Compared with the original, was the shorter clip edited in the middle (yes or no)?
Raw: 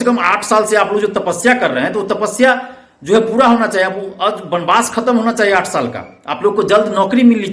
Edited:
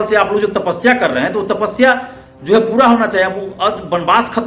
no